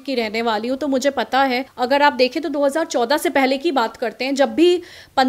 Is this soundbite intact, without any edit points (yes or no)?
no